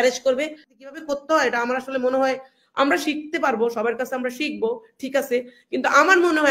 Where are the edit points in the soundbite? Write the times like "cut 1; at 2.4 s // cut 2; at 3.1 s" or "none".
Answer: cut 1; at 1.0 s